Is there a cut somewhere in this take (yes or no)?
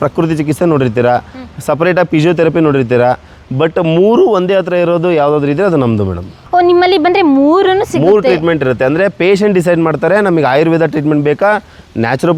no